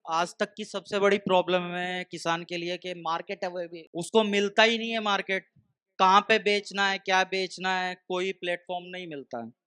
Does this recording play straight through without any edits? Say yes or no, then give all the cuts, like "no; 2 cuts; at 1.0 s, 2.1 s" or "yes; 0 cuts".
yes; 0 cuts